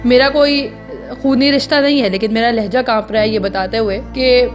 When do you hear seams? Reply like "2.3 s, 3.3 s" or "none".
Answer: none